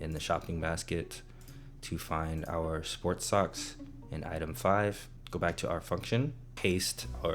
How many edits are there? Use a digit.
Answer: 2